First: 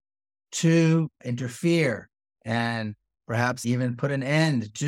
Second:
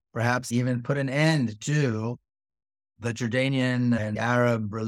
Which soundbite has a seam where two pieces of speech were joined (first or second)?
second